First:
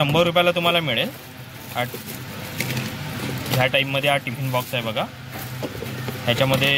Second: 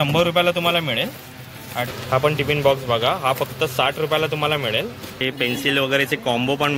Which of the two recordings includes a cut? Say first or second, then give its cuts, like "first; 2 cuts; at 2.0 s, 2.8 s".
second; 2 cuts; at 1.9 s, 5.2 s